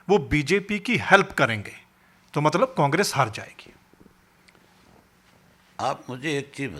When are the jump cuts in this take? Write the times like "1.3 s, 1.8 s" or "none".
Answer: none